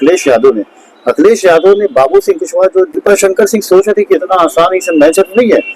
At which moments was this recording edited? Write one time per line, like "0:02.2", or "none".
0:03.0